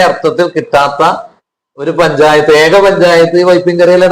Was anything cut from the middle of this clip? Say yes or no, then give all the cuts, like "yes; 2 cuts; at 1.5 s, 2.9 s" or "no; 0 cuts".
no; 0 cuts